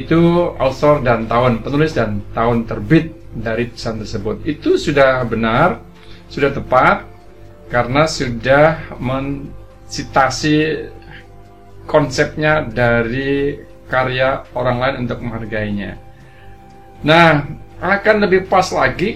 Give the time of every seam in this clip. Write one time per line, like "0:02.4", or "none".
none